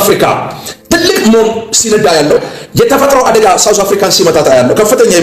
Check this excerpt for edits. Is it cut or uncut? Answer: cut